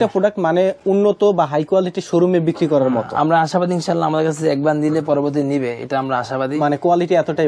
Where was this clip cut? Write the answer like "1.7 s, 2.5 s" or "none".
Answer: none